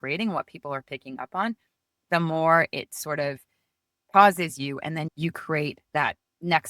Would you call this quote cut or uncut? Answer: cut